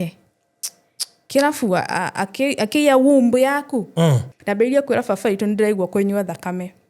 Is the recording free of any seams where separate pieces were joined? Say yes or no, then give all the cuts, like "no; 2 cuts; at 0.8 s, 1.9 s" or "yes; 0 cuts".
no; 1 cut; at 4.3 s